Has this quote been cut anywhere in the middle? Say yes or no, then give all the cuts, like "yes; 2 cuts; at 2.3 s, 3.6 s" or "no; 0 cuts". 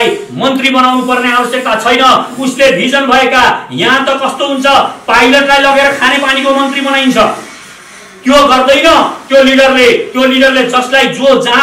no; 0 cuts